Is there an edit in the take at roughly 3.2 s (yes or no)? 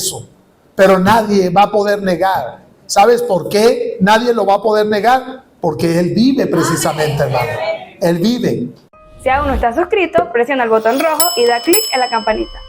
no